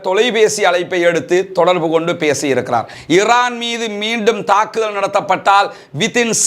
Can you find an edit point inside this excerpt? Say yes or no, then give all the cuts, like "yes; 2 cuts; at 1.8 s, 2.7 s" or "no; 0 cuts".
yes; 1 cut; at 2.9 s